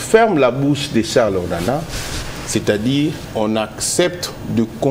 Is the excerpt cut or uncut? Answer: cut